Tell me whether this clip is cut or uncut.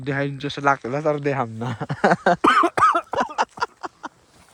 uncut